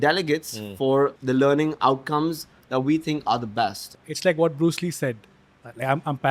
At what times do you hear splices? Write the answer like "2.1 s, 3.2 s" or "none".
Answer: 1.2 s, 3.9 s